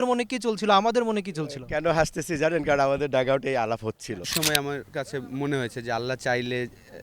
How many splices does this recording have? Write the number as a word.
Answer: one